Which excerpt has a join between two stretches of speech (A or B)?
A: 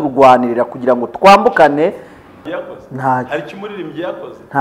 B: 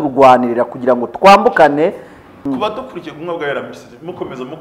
A